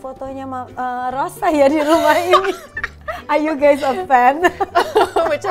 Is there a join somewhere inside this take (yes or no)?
no